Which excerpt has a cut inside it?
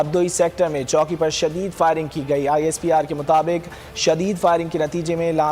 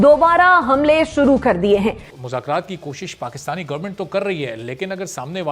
second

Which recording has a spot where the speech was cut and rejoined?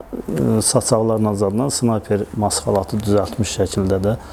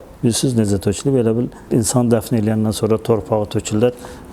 second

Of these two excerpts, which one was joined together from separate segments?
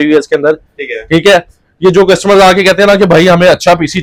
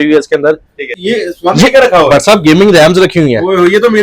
second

